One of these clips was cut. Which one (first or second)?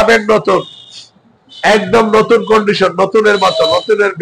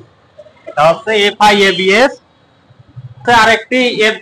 second